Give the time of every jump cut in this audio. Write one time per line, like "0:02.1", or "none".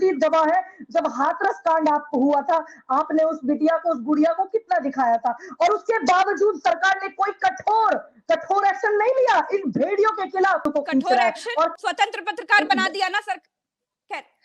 0:10.7
0:11.8

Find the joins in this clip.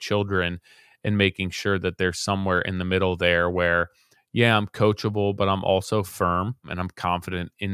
0:06.8

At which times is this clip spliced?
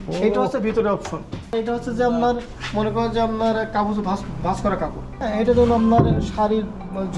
0:01.5
0:05.2

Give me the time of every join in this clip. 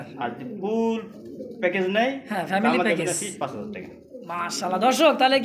none

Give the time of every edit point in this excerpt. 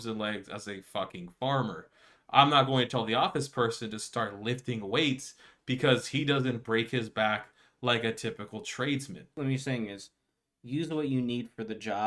0:09.3

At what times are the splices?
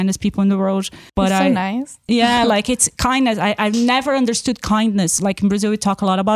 none

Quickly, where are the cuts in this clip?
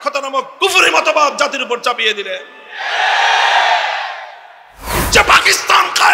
0:05.0

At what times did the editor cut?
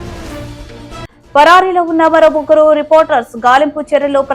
0:01.2

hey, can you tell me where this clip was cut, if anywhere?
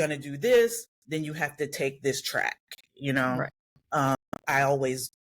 0:04.2

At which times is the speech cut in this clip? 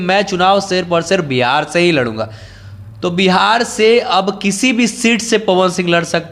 none

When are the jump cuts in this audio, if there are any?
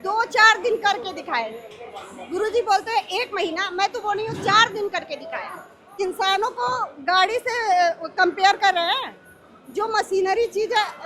0:05.9

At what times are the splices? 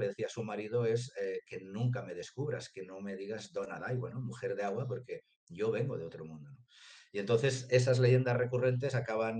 none

